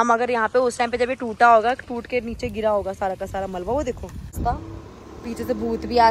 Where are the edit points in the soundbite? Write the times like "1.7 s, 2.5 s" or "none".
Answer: 4.4 s